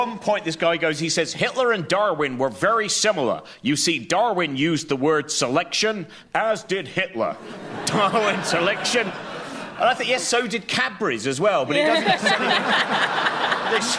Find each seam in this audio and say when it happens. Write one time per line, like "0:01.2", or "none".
0:09.7